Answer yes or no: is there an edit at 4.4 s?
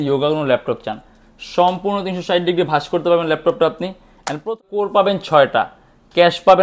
yes